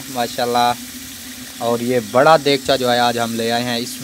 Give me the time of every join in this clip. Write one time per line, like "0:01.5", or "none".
none